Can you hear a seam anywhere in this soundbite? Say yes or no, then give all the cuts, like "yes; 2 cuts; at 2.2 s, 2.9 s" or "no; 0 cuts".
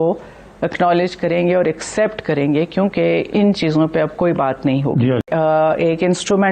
yes; 1 cut; at 5.2 s